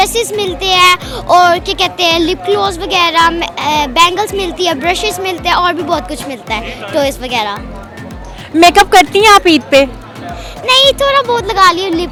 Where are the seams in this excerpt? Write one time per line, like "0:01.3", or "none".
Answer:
none